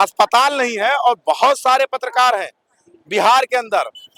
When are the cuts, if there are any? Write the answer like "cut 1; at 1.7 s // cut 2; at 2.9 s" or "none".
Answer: none